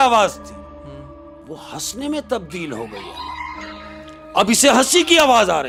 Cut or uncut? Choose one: uncut